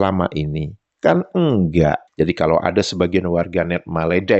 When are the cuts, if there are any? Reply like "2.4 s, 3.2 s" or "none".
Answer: 2.1 s